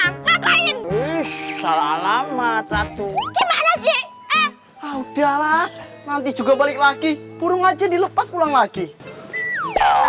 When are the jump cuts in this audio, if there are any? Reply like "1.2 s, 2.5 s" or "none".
3.2 s